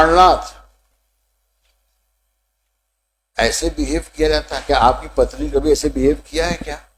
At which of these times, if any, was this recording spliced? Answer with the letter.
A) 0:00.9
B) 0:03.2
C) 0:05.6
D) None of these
D